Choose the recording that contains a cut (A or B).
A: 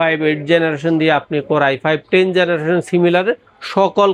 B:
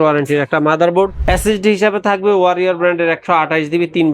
B